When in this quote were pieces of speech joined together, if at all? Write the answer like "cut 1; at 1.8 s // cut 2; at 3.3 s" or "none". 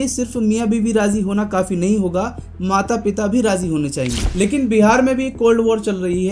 cut 1; at 4.2 s